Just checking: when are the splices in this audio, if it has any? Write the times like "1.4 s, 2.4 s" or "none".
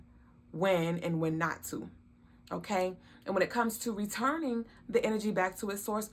none